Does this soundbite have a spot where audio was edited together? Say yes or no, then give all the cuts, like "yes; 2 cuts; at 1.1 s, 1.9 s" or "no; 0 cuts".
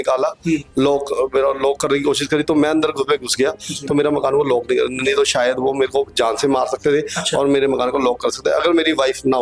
no; 0 cuts